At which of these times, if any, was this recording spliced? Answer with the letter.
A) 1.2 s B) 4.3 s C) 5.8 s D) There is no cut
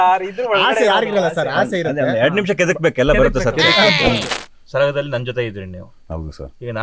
B